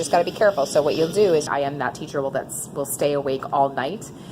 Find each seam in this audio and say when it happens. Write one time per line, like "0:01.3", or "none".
0:01.5